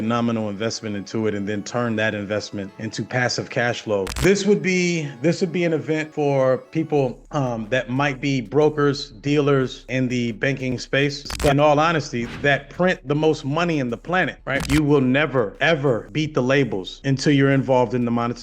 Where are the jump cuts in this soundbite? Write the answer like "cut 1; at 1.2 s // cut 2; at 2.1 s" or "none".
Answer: cut 1; at 4.1 s // cut 2; at 11.5 s // cut 3; at 14.6 s